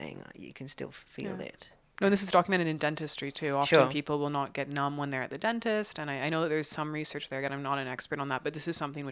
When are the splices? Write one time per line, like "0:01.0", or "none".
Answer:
none